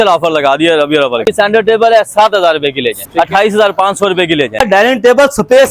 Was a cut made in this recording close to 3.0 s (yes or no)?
yes